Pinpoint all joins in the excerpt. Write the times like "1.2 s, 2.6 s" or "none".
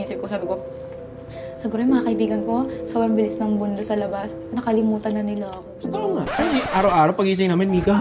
none

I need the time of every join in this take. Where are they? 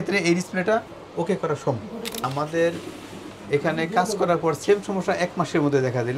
2.2 s

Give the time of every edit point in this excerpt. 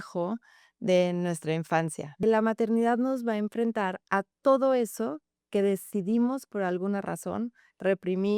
2.2 s

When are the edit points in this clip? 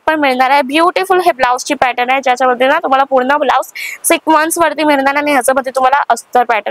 none

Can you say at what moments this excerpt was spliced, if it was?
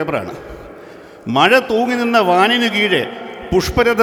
none

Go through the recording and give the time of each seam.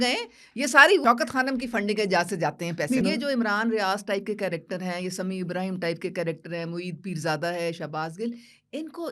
1.0 s, 3.0 s

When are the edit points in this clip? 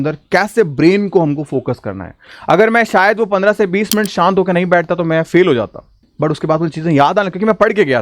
6.0 s

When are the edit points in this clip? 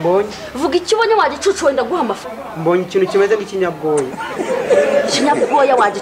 2.2 s

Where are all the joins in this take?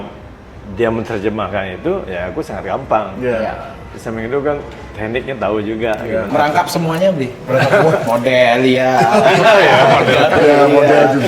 6.3 s

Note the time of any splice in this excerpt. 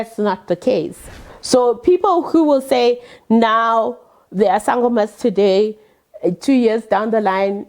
1.0 s

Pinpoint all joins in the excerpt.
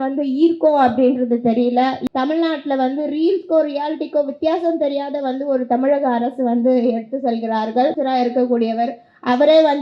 2.0 s, 7.9 s

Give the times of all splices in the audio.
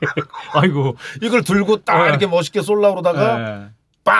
none

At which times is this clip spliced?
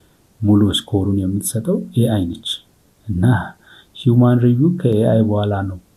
none

